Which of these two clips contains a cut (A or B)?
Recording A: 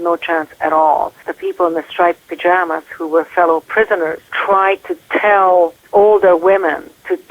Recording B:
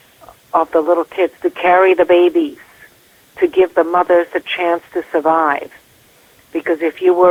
A